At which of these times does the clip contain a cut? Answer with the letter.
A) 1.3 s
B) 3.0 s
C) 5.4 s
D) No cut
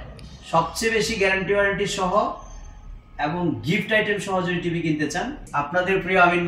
C